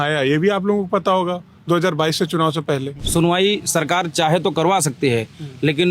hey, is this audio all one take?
no; 1 cut; at 3.0 s

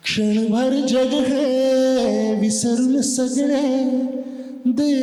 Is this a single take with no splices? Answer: yes; 0 cuts

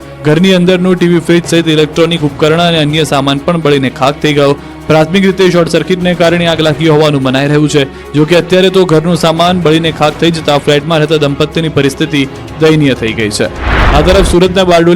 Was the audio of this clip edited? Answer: no; 0 cuts

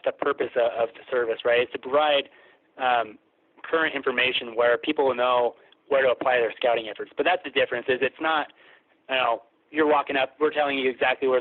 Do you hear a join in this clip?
no; 0 cuts

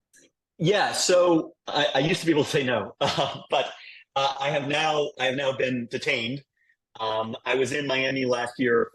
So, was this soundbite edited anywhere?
no; 0 cuts

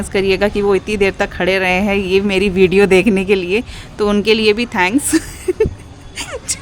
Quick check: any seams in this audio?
no; 0 cuts

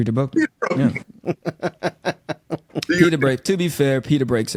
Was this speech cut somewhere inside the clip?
no; 0 cuts

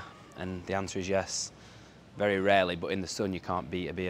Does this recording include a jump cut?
no; 0 cuts

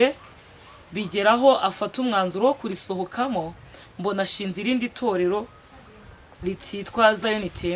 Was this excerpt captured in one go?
yes; 0 cuts

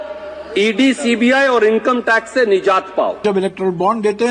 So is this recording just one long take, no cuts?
no; 1 cut; at 3.2 s

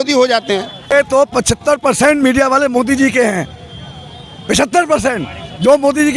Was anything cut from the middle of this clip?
yes; 1 cut; at 0.9 s

